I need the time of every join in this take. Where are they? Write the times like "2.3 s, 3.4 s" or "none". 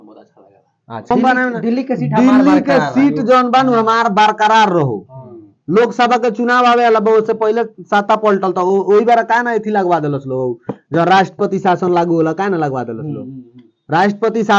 1.1 s